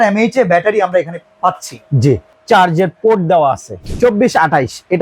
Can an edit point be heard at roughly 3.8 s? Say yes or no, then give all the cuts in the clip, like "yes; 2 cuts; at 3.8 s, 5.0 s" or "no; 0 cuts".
yes; 2 cuts; at 2.3 s, 3.8 s